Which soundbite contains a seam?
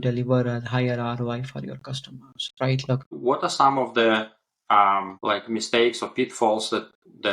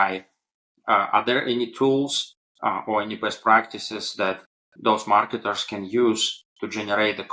first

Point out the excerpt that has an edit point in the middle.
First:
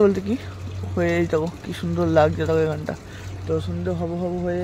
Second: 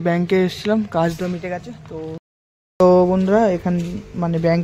second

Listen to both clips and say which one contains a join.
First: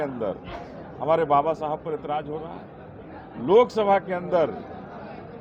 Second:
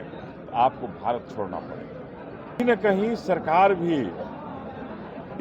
second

